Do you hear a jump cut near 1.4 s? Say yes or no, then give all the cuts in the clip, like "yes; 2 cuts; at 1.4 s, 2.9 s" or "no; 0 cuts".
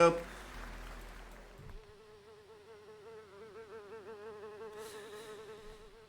yes; 1 cut; at 1.4 s